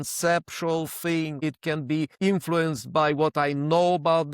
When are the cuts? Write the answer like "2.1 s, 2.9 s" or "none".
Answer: 1.4 s